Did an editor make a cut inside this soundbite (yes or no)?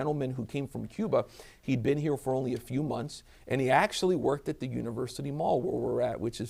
no